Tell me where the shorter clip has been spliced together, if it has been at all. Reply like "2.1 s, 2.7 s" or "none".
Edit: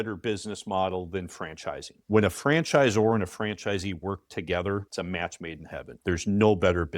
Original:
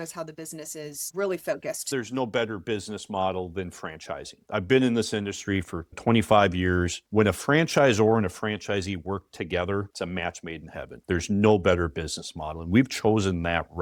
1.9 s